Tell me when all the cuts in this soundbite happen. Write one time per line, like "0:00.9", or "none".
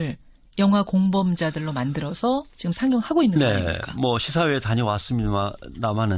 0:04.2